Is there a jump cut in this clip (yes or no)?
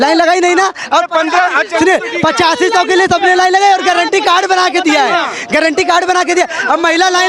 no